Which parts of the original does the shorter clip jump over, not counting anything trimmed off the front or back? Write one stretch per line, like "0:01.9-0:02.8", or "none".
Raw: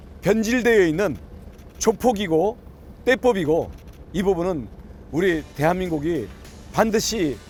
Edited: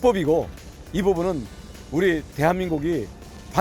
none